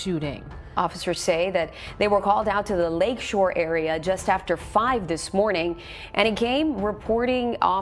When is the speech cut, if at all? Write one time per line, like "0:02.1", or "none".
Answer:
none